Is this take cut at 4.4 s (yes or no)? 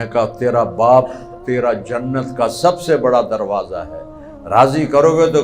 no